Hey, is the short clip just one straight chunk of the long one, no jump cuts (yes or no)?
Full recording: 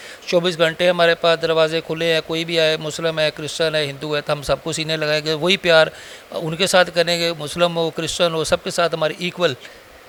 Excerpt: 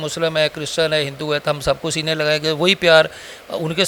yes